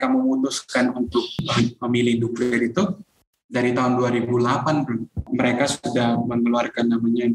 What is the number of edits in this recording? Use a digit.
2